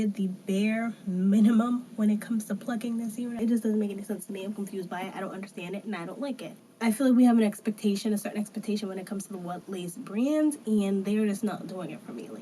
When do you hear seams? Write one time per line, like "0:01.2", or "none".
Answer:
0:03.4
0:06.6